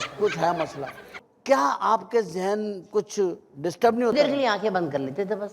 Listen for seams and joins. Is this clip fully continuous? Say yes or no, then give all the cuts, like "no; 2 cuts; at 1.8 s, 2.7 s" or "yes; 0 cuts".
no; 1 cut; at 1.3 s